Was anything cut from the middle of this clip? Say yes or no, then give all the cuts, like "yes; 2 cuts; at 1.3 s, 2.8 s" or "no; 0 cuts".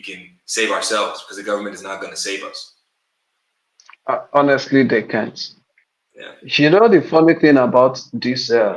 no; 0 cuts